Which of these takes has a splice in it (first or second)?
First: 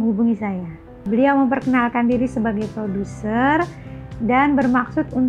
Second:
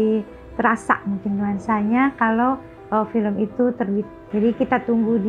second